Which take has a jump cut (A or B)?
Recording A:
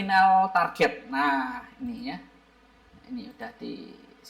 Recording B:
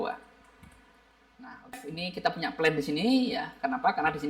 B